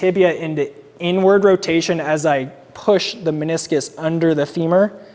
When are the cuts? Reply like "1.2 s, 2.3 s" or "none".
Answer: none